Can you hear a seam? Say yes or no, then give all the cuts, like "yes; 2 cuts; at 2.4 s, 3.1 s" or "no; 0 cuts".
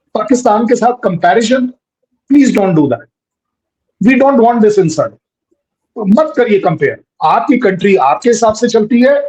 no; 0 cuts